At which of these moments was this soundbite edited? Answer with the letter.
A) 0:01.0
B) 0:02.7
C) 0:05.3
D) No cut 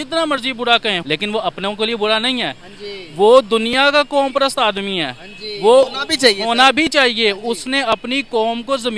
A